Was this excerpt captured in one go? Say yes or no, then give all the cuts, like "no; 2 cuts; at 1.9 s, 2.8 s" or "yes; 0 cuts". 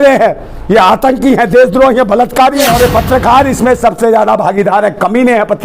no; 1 cut; at 2.7 s